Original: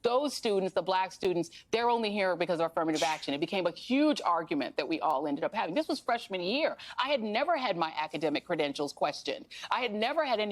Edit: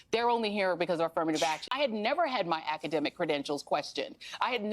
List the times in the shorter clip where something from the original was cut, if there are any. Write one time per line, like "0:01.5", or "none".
0:01.6